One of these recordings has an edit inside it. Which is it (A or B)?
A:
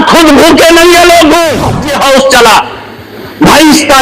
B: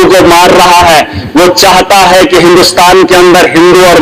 A